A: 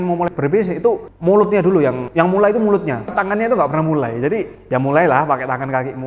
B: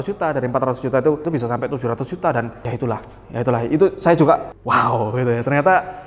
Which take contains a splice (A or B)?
B